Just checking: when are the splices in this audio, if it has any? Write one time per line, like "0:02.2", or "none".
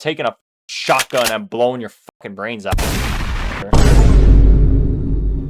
0:03.6